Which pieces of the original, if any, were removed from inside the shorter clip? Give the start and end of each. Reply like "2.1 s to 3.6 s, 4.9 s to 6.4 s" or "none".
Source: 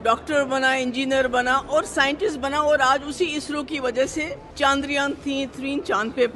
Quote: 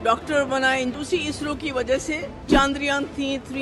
0.9 s to 3.0 s